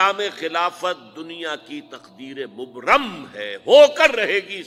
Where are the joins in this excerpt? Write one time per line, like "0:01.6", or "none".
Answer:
none